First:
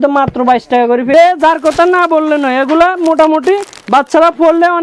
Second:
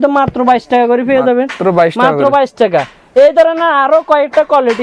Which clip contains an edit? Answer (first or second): first